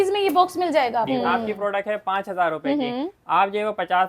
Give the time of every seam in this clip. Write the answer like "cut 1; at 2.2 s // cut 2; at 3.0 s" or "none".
cut 1; at 1.1 s